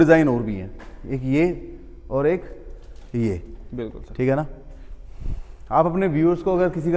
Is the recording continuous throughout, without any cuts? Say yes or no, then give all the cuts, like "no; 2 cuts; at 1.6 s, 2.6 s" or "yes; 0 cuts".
yes; 0 cuts